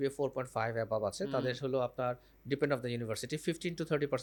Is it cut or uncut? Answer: uncut